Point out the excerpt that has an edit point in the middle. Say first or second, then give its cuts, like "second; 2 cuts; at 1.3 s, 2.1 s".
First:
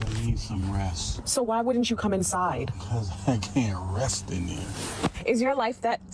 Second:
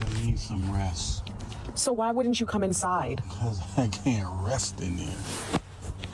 first; 2 cuts; at 1.1 s, 5.2 s